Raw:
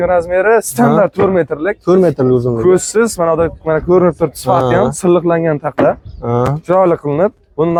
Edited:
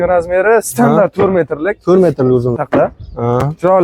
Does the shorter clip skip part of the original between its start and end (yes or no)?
yes